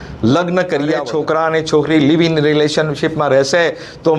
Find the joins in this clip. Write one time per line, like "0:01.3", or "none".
0:01.0